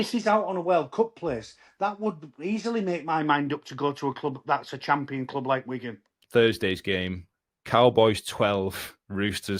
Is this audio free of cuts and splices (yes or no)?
no